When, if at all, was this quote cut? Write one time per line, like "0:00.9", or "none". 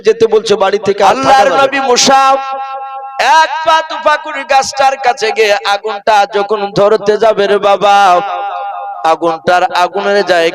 0:01.1

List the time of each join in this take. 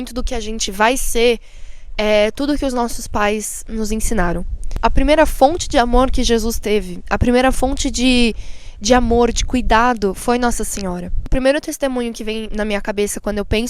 0:04.7
0:11.3

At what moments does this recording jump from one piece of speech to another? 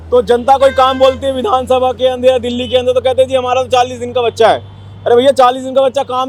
none

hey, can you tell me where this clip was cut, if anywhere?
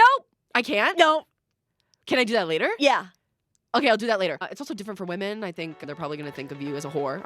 0:04.5
0:05.8

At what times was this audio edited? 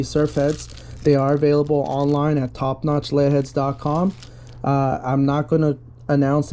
none

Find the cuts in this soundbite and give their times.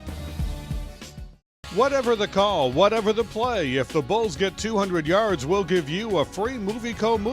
0:01.0

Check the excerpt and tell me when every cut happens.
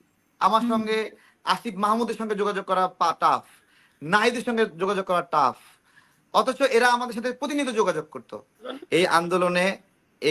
0:08.7

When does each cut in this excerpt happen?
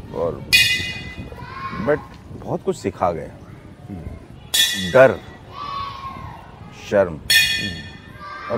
0:04.3

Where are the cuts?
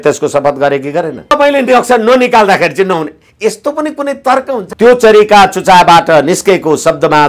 0:01.3
0:04.7

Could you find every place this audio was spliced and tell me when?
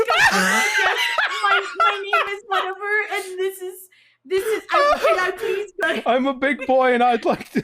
0:05.7

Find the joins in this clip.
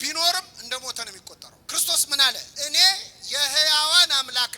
0:02.5

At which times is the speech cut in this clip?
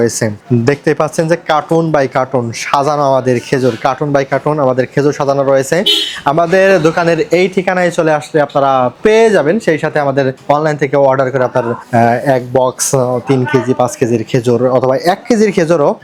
none

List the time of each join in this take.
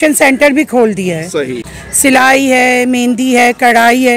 0:01.6

